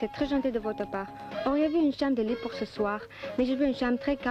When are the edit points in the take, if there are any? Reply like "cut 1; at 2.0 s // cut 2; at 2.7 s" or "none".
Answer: none